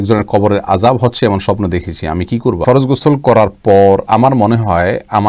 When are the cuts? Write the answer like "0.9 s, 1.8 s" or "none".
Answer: 2.6 s